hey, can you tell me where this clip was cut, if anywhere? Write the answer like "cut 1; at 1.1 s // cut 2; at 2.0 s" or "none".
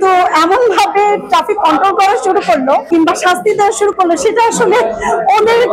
cut 1; at 2.8 s